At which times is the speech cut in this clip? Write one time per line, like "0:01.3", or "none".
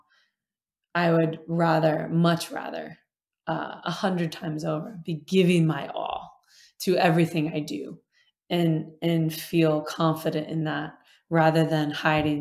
none